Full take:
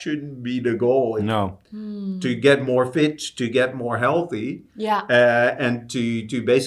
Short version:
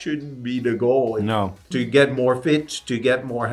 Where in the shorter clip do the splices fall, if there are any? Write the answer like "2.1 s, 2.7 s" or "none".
1.6 s